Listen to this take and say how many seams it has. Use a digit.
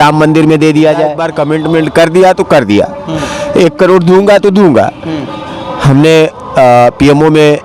1